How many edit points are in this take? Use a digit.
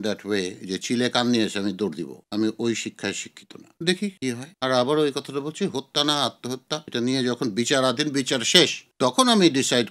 2